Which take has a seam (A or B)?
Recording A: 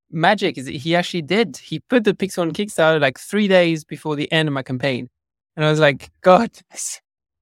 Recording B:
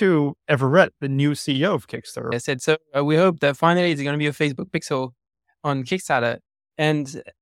B